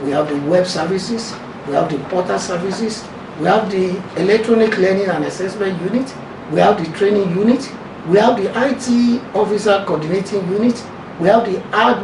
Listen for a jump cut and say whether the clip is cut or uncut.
uncut